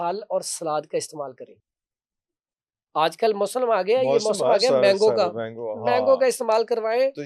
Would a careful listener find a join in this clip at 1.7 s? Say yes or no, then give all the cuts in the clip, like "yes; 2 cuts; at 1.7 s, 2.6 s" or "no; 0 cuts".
no; 0 cuts